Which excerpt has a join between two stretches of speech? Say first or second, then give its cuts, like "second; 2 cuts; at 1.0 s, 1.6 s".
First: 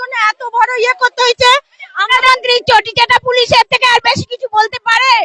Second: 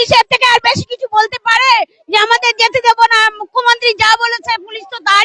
first; 1 cut; at 2.3 s